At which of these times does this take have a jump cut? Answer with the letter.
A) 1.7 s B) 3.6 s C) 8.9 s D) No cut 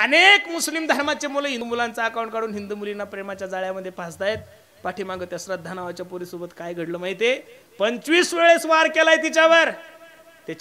A